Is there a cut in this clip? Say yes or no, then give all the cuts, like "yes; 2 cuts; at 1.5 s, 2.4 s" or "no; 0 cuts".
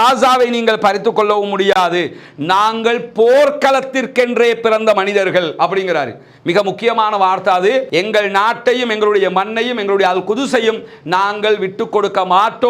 yes; 1 cut; at 7.9 s